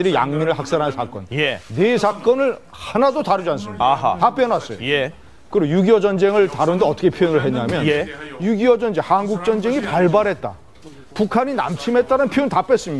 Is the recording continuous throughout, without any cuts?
no; 1 cut; at 3.4 s

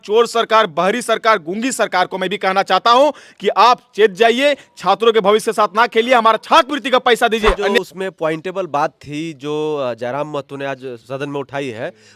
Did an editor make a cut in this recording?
yes; 1 cut; at 7.7 s

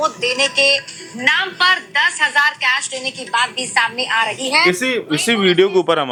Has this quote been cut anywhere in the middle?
no; 0 cuts

